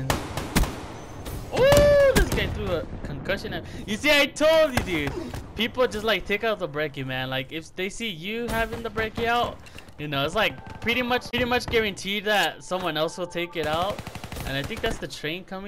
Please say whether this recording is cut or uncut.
uncut